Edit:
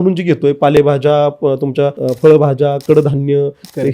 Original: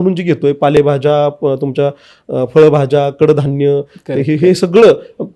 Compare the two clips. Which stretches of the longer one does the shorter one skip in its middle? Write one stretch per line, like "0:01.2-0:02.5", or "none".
0:02.0-0:02.3